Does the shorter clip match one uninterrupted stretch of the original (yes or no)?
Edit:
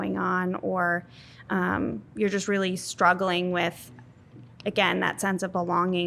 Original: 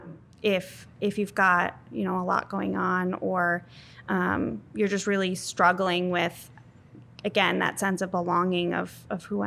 yes